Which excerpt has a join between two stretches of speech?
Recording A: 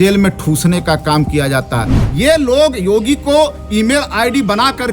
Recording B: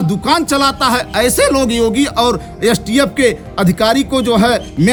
A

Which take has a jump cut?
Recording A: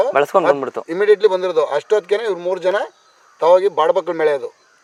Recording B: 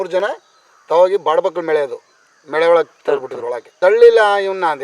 B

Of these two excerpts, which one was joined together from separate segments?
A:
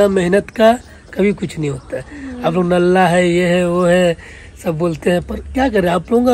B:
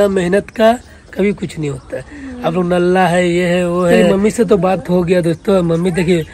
B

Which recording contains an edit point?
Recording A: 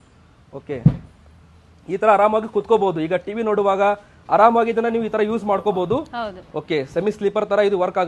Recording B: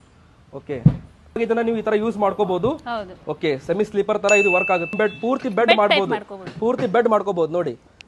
B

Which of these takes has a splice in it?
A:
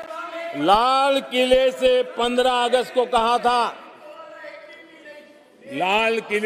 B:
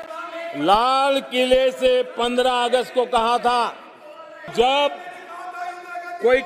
B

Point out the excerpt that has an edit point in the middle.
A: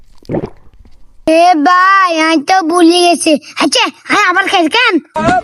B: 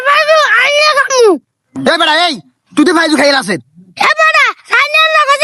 A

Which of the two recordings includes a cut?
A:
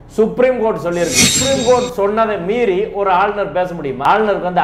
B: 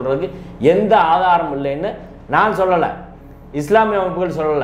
A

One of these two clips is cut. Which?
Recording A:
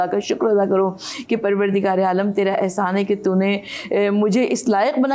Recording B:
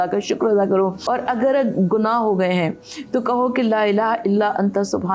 B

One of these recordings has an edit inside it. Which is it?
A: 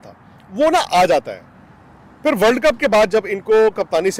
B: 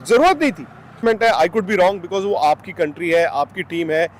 B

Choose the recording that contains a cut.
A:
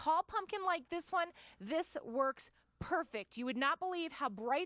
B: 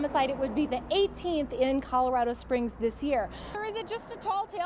B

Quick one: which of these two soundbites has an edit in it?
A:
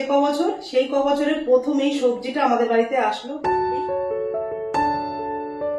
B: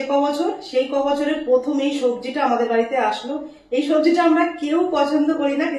A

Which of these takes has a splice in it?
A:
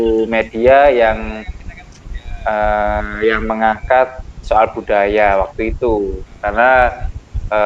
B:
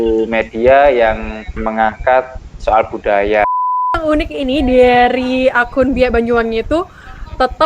B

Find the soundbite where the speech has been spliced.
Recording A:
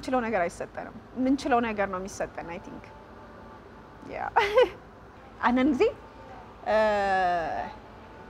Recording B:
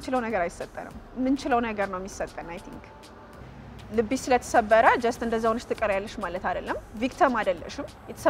B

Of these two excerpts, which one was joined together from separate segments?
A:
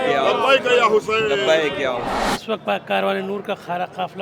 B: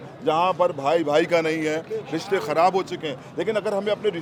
A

